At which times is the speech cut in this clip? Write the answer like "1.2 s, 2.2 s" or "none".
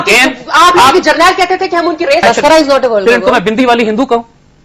2.2 s